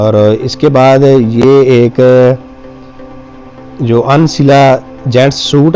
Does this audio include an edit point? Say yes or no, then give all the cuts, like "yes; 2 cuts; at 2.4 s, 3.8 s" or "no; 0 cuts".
no; 0 cuts